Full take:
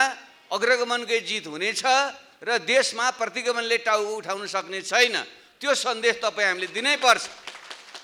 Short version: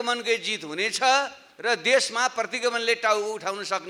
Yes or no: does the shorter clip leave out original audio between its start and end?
no